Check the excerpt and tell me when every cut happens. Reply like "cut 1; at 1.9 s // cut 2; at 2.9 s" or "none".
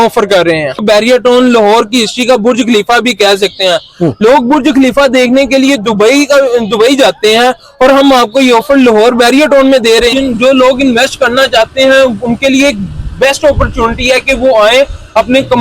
cut 1; at 0.8 s // cut 2; at 10.1 s

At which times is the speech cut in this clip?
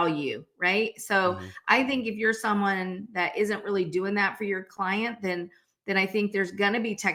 none

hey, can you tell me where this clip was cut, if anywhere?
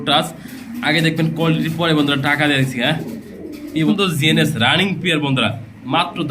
cut 1; at 3.9 s

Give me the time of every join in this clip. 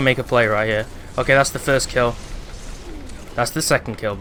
none

